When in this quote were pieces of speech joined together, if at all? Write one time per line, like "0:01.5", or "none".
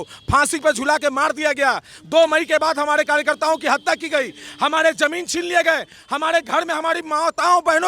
none